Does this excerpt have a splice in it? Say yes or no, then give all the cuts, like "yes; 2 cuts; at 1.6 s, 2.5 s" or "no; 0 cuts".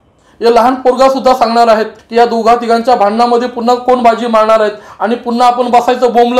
yes; 1 cut; at 2.0 s